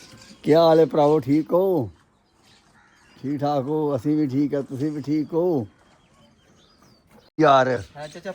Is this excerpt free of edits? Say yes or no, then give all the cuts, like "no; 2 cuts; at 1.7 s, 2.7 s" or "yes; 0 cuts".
no; 1 cut; at 7.4 s